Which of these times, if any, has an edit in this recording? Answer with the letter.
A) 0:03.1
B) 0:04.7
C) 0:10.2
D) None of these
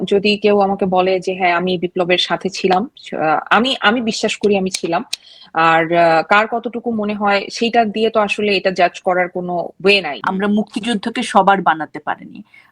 C